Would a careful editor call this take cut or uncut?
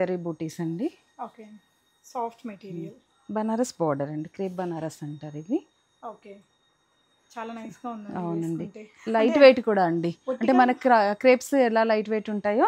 uncut